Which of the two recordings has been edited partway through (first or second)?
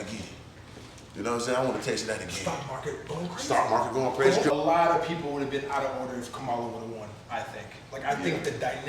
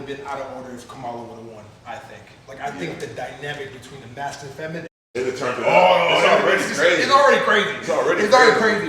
first